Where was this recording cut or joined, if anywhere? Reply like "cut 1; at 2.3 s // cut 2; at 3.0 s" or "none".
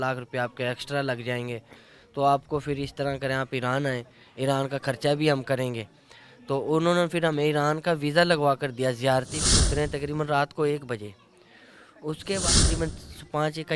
cut 1; at 9.6 s // cut 2; at 12.4 s

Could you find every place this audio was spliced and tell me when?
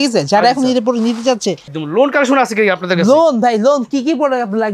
cut 1; at 1.7 s

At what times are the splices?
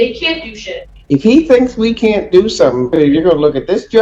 cut 1; at 0.9 s // cut 2; at 2.9 s

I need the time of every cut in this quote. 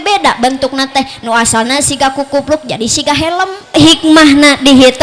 cut 1; at 3.7 s

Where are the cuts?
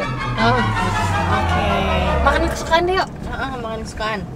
none

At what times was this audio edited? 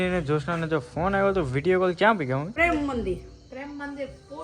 cut 1; at 2.5 s

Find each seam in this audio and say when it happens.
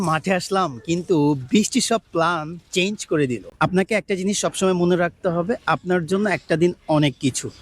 cut 1; at 3.5 s

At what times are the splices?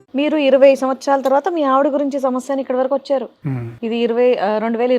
none

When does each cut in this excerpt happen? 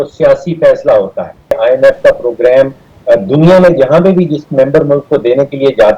cut 1; at 1.6 s

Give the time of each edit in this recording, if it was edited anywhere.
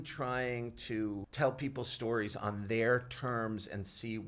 cut 1; at 1.3 s

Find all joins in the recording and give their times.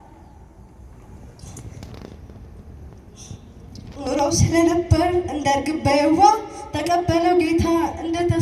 none

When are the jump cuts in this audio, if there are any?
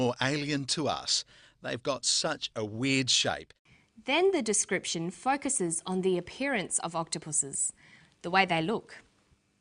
none

